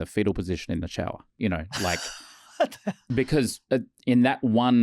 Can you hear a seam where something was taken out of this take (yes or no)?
yes